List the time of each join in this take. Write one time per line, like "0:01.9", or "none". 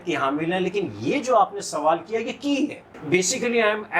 0:03.0